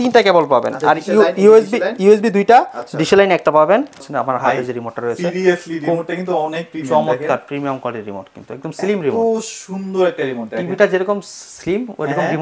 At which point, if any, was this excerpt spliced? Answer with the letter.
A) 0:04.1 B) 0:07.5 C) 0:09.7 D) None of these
A